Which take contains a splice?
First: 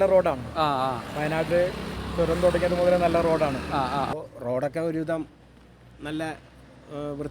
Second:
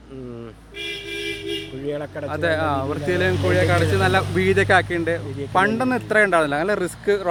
first; 1 cut; at 4.1 s

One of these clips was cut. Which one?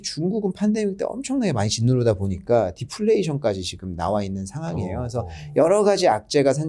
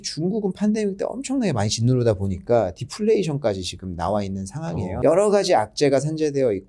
second; 1 cut; at 5.0 s

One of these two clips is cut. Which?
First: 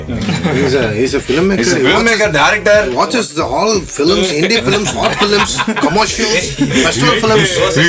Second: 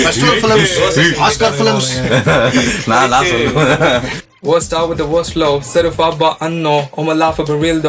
second; 1 cut; at 4.2 s

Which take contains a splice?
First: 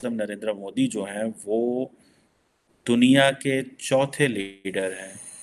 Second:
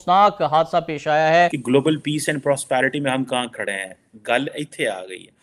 second; 1 cut; at 1.6 s

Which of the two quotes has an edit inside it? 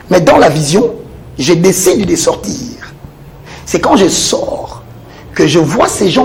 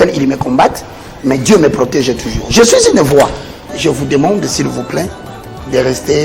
second; 1 cut; at 3.7 s

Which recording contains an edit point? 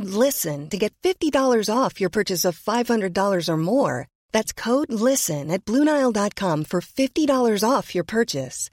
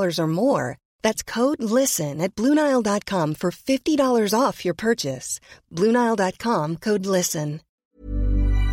second; 1 cut; at 7.8 s

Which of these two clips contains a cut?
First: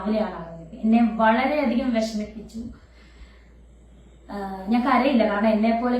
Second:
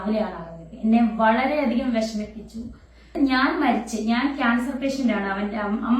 second; 1 cut; at 3.1 s

